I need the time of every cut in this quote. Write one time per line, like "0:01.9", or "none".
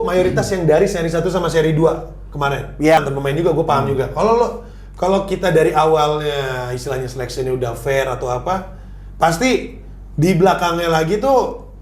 0:03.0